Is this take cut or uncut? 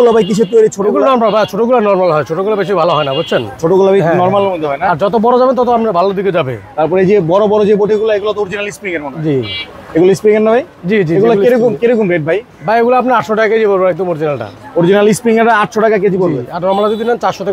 uncut